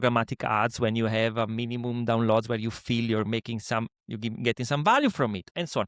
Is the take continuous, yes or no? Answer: yes